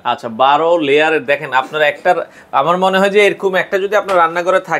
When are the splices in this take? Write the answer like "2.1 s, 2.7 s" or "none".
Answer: none